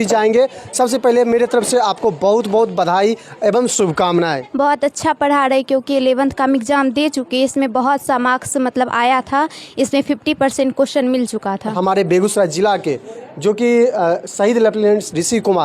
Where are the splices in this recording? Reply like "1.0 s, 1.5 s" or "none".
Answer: 4.4 s, 11.7 s